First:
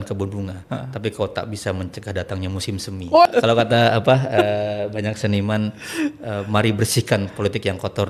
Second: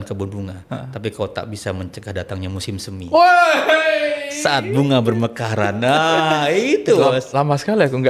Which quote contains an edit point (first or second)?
first